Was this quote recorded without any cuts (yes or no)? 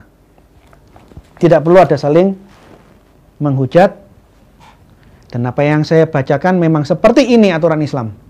yes